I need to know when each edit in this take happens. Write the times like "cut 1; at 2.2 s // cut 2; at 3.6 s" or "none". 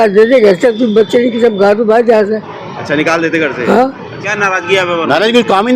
cut 1; at 4.1 s